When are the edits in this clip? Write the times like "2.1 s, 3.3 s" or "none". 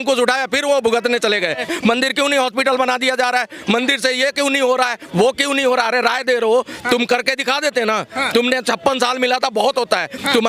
1.6 s